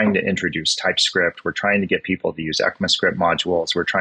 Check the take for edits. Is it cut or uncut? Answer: uncut